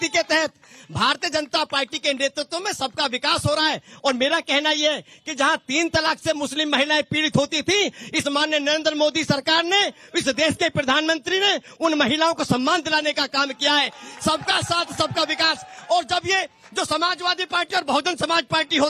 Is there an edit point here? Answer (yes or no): no